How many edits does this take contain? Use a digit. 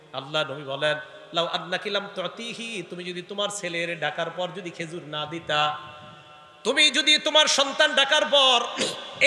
0